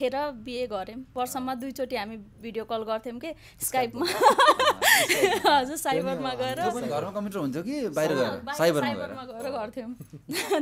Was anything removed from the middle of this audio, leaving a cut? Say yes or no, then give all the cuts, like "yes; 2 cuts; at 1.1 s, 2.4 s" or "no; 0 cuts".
yes; 1 cut; at 1.1 s